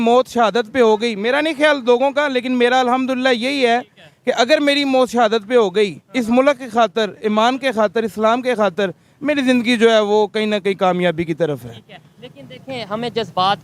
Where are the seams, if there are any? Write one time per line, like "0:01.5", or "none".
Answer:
none